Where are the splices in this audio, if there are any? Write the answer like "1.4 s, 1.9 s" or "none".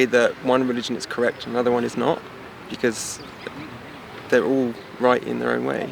none